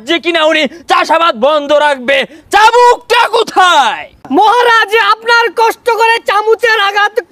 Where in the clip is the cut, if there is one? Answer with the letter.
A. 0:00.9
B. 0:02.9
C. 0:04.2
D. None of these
C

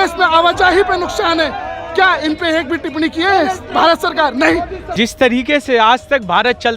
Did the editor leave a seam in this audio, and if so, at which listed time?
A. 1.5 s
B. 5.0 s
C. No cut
B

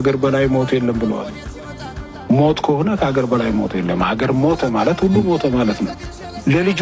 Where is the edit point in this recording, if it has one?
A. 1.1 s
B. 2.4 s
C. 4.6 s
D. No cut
D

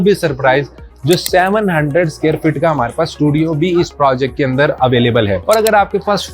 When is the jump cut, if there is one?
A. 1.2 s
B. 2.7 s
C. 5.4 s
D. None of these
C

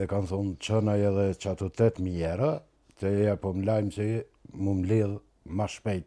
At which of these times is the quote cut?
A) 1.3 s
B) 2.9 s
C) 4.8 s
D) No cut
D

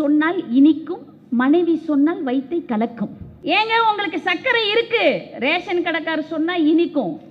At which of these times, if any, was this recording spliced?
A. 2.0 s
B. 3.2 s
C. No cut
B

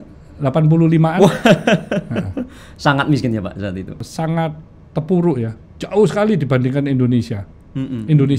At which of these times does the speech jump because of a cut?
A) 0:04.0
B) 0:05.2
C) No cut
A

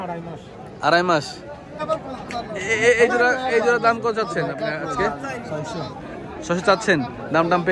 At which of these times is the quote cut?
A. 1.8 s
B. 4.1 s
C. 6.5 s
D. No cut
A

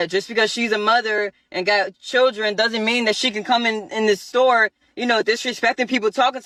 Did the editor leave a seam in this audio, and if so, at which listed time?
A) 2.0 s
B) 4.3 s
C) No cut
C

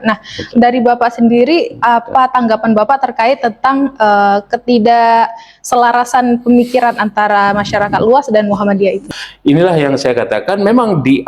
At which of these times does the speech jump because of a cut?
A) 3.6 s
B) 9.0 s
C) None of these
B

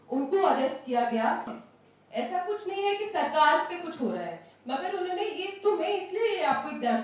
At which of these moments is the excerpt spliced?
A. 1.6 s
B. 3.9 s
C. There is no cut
A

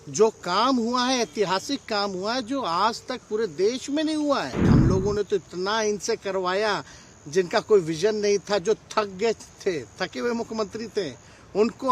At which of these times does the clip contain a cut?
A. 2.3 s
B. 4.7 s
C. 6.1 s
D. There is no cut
B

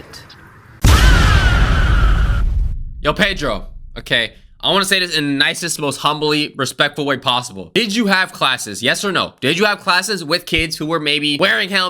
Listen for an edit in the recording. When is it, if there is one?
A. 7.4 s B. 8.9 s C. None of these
C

